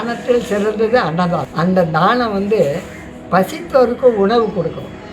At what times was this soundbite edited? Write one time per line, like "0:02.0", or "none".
0:01.5